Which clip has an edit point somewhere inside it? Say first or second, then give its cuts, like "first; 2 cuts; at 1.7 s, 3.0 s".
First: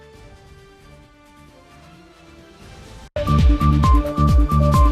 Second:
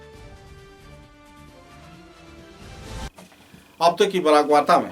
first; 1 cut; at 3.0 s